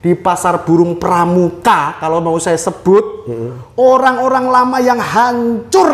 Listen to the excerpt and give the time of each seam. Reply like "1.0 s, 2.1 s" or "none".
none